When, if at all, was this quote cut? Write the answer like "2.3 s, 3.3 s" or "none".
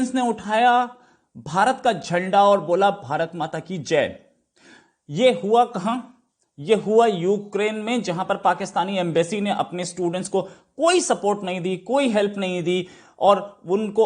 none